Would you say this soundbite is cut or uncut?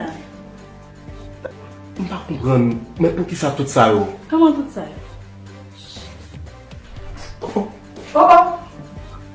cut